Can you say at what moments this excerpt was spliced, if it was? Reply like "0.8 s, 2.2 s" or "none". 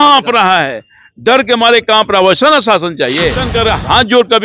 3.5 s